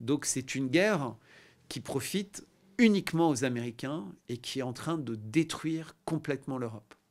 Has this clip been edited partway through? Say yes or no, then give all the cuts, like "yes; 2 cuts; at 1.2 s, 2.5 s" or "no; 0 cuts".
no; 0 cuts